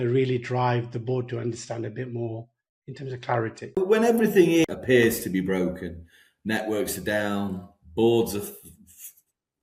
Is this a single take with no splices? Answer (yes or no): no